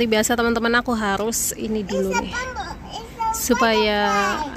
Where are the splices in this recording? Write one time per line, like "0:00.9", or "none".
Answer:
none